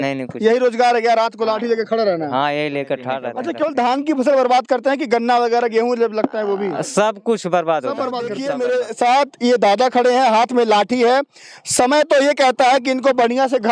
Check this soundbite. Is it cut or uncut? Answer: cut